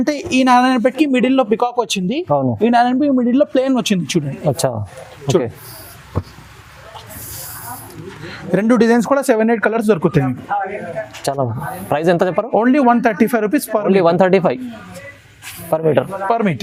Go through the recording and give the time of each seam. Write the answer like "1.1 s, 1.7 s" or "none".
none